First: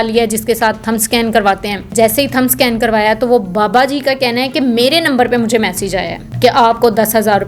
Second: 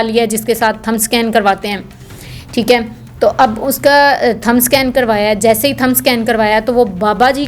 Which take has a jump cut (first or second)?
first